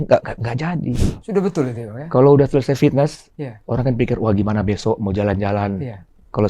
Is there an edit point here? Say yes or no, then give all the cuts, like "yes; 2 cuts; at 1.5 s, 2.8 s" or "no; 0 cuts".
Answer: yes; 1 cut; at 1.0 s